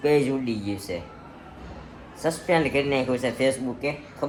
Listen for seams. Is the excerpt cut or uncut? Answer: uncut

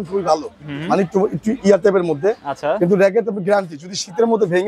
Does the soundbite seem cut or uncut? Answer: uncut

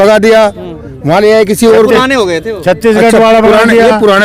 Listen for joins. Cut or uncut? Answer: uncut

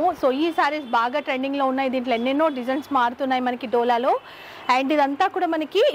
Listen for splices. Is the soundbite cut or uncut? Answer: uncut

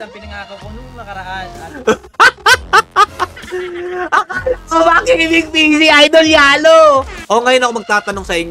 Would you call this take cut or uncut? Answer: cut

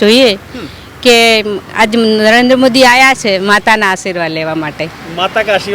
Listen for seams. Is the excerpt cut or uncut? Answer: uncut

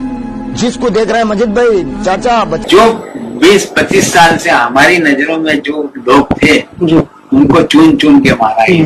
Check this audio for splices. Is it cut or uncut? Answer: cut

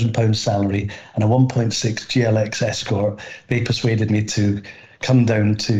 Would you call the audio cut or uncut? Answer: uncut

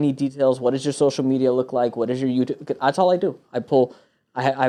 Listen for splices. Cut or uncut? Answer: uncut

